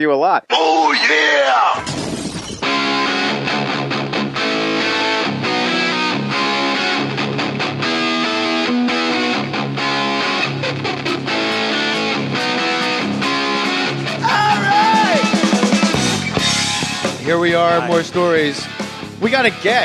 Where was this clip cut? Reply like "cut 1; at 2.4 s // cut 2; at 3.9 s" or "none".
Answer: cut 1; at 2.4 s